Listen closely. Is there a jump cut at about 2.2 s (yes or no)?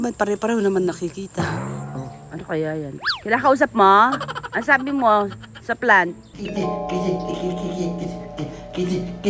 no